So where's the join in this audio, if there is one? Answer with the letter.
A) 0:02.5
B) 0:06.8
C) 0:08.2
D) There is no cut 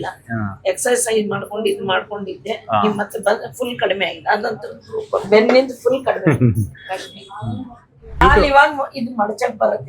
C